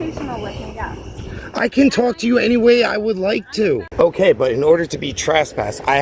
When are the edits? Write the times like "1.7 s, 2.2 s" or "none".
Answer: 3.9 s